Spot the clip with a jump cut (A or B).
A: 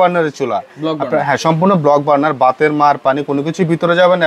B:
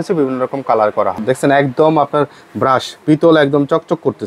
B